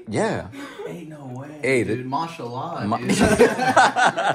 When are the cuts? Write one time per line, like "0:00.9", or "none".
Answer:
none